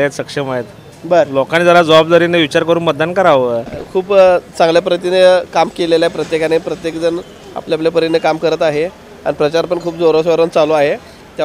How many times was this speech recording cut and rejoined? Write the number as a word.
one